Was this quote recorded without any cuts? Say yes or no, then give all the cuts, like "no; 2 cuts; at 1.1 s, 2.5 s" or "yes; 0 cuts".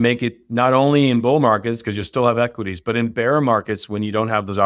yes; 0 cuts